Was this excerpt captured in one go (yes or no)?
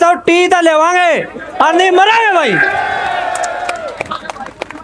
yes